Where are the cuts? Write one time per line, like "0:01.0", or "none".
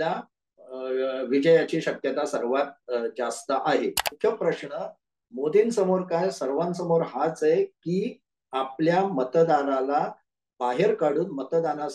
0:04.1